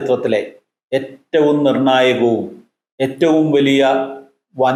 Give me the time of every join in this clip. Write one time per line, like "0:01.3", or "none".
none